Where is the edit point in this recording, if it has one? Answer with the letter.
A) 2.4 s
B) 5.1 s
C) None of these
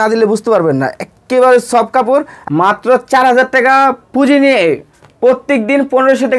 A